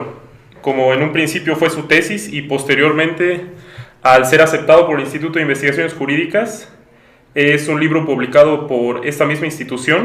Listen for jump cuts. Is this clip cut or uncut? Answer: uncut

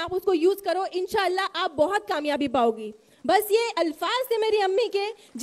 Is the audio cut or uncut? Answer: uncut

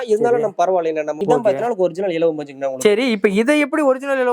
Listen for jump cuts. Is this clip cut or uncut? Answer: cut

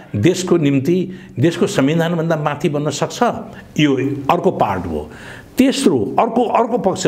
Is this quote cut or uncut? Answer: uncut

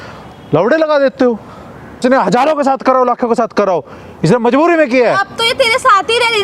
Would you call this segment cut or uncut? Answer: cut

